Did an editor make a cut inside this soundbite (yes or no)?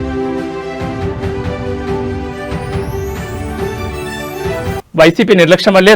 yes